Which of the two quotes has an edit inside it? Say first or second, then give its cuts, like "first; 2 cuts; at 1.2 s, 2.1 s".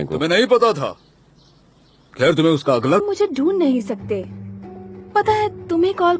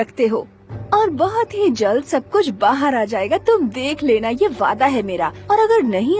first; 1 cut; at 3.0 s